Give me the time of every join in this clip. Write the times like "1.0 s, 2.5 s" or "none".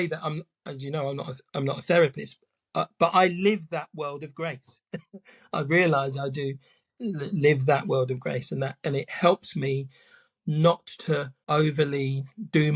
11.4 s